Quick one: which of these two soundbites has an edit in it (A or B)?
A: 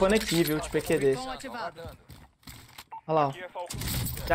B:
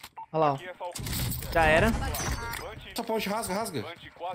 B